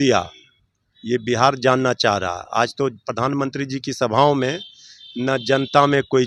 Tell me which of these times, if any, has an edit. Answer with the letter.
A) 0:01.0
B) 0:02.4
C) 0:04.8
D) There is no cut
D